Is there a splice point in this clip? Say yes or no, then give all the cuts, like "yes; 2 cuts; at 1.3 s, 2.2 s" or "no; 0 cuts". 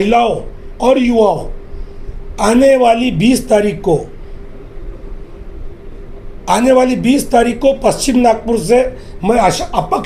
no; 0 cuts